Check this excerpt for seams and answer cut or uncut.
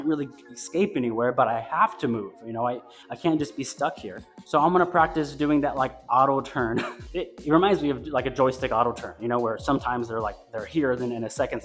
uncut